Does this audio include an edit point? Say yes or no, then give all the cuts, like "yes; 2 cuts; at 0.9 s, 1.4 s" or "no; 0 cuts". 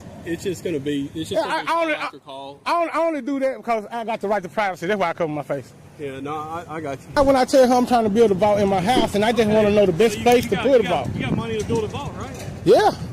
yes; 1 cut; at 7.2 s